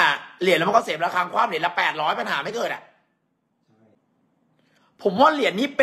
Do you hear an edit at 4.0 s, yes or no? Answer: yes